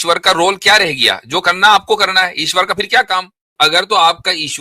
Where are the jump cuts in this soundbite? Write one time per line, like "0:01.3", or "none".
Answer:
0:03.5